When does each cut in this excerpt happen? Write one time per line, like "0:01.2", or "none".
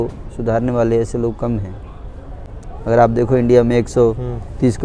none